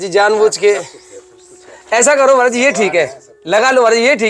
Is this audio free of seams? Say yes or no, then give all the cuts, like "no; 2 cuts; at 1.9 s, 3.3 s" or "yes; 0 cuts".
yes; 0 cuts